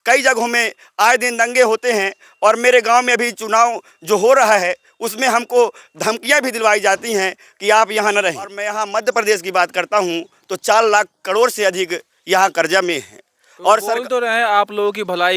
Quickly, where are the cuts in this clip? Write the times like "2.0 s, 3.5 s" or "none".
8.7 s